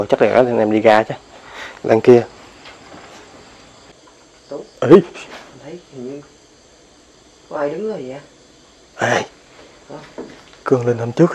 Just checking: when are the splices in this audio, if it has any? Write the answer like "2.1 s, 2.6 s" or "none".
3.9 s